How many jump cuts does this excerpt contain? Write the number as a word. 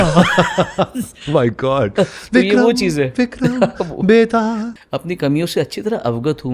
one